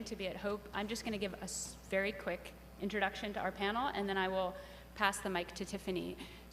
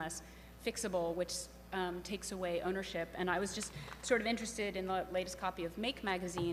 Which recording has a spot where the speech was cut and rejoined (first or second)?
first